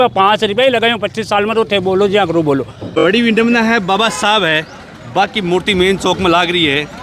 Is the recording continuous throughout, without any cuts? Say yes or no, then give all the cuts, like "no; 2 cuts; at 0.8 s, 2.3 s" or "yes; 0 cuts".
no; 1 cut; at 2.8 s